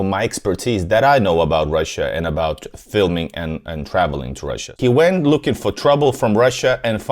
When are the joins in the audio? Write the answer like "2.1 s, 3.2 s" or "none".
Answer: 4.8 s

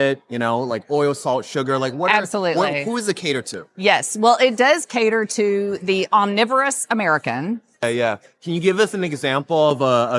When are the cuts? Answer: 7.8 s

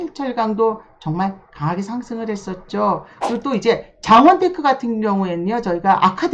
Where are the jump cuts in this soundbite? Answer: 3.1 s

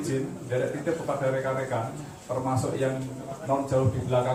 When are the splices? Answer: none

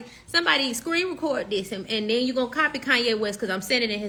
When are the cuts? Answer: none

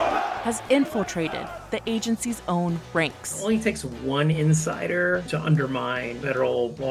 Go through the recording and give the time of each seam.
5.3 s

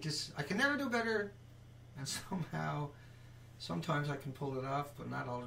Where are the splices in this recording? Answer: 1.4 s

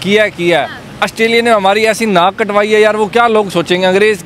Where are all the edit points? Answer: none

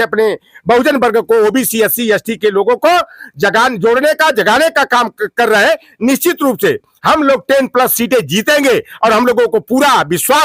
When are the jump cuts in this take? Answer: none

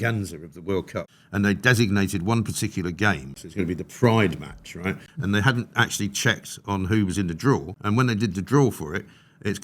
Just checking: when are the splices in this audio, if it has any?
1.1 s, 3.4 s, 5.1 s, 7.7 s

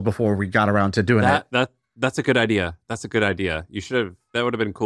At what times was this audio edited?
none

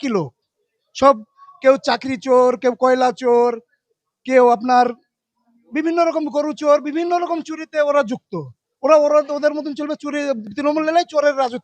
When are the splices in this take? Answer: none

